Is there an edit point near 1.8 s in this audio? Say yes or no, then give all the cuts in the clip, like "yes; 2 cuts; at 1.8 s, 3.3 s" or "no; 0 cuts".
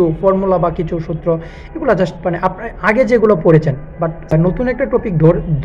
no; 1 cut; at 4.3 s